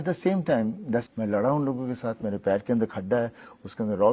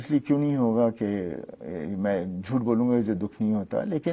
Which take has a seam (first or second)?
first